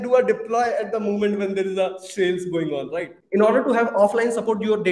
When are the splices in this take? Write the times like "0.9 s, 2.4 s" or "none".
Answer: 3.1 s